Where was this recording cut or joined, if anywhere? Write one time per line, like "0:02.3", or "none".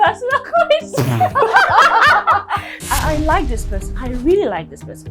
0:02.7